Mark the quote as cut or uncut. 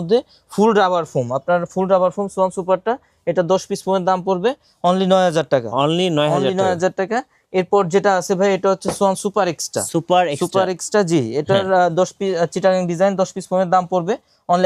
uncut